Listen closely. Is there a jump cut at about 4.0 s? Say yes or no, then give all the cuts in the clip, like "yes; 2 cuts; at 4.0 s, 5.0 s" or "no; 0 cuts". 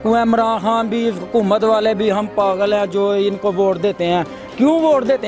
no; 0 cuts